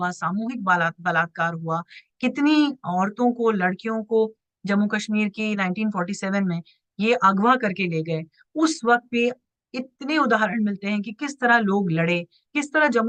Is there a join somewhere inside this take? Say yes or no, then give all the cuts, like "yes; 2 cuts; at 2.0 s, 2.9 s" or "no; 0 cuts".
no; 0 cuts